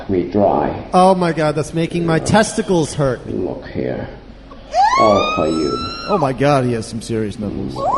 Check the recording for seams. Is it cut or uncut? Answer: uncut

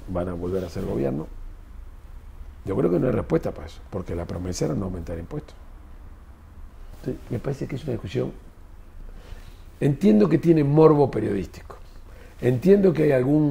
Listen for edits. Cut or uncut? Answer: uncut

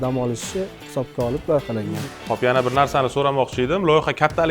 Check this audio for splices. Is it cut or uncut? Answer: cut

